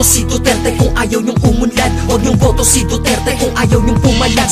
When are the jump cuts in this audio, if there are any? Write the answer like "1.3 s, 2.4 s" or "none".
1.6 s